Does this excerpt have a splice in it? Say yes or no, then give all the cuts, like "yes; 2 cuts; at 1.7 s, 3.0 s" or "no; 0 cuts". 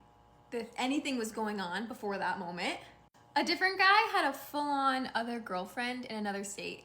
yes; 1 cut; at 4.4 s